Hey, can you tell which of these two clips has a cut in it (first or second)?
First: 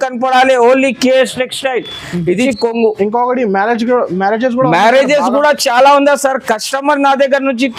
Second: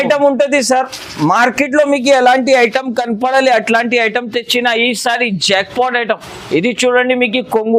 first